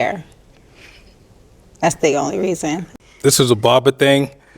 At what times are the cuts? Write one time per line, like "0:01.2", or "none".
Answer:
0:02.8